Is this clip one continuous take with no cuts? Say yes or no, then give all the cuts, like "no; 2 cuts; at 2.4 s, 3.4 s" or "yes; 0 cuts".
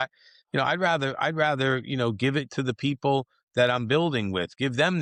yes; 0 cuts